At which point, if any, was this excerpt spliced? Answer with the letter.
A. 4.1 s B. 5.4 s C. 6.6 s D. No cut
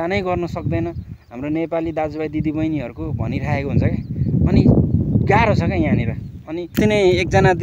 C